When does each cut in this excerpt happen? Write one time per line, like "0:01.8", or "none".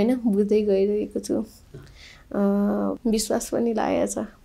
0:03.0